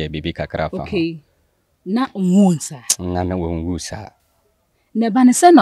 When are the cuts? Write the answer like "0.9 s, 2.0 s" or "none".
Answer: none